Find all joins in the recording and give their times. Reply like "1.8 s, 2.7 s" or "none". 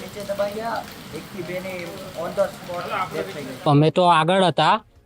3.5 s